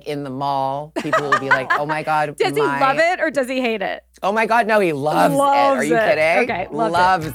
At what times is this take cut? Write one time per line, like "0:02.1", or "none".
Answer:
none